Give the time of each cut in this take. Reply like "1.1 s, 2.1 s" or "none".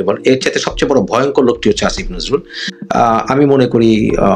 2.8 s